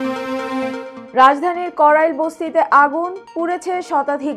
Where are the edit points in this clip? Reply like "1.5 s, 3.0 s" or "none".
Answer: none

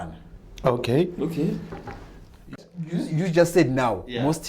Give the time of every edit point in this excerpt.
2.6 s

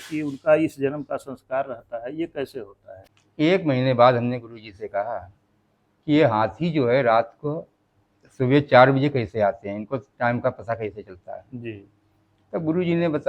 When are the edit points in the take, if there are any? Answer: 3.0 s

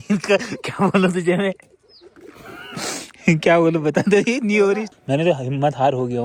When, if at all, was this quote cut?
none

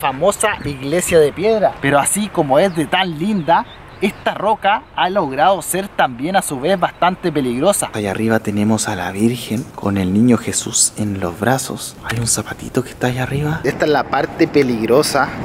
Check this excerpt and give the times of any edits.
1.7 s, 7.9 s, 12.0 s, 13.6 s

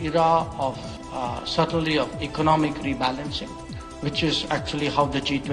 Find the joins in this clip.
none

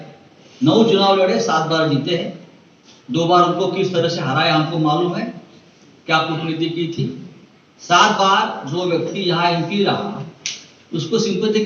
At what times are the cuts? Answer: none

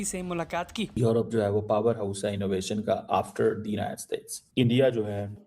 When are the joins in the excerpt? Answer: 0.9 s

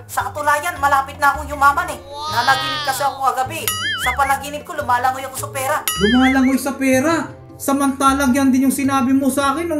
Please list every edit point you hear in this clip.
2.2 s, 5.9 s

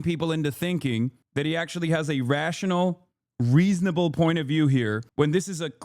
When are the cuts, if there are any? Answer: 1.2 s, 5.0 s

